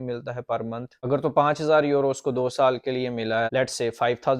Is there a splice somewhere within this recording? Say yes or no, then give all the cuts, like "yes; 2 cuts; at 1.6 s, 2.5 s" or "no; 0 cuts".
yes; 2 cuts; at 0.9 s, 3.5 s